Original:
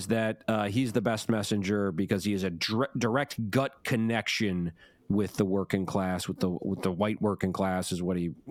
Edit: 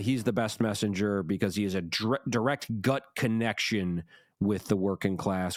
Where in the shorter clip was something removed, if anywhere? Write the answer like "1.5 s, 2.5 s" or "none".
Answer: none